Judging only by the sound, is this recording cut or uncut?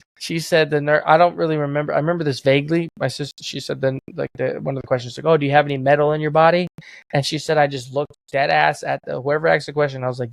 uncut